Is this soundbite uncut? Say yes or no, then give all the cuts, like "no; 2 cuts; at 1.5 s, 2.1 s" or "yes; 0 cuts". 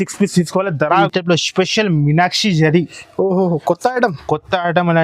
no; 1 cut; at 1.0 s